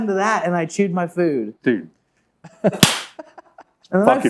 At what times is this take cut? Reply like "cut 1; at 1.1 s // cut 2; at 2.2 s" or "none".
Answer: cut 1; at 1.5 s